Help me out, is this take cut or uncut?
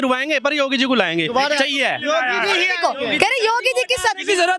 uncut